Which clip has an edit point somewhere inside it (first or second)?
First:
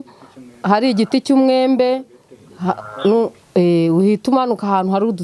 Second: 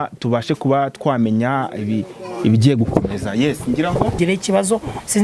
second